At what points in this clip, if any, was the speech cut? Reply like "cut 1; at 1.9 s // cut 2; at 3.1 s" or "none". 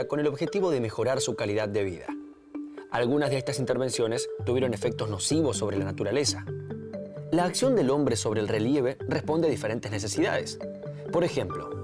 cut 1; at 2.8 s